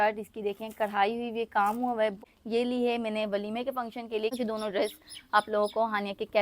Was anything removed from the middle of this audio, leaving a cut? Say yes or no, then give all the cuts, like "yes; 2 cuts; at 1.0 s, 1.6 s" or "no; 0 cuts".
yes; 2 cuts; at 2.2 s, 4.3 s